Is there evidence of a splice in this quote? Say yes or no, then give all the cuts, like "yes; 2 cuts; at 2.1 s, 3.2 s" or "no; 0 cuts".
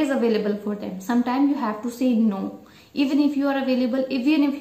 no; 0 cuts